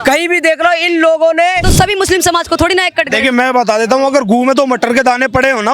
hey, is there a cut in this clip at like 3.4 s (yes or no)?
no